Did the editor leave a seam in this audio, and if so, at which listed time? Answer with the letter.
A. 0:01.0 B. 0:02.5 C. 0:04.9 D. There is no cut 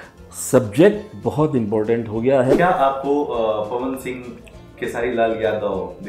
B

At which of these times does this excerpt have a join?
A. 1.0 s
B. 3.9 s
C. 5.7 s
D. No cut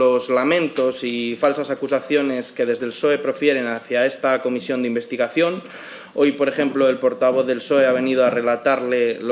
D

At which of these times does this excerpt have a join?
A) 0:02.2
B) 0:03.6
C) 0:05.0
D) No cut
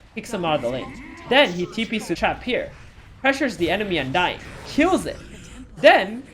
A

